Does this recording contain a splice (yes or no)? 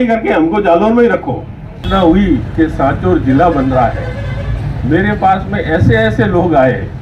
yes